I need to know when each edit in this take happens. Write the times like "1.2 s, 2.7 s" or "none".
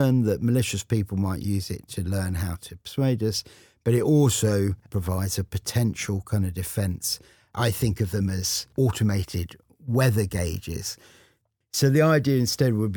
4.9 s, 7.5 s, 8.6 s, 11.4 s